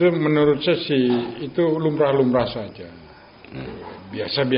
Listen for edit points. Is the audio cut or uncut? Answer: uncut